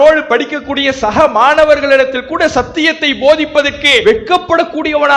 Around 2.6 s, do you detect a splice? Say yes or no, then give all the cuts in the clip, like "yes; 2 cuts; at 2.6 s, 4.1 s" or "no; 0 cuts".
no; 1 cut; at 4.0 s